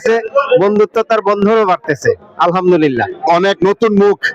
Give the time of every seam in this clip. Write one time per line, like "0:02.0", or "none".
none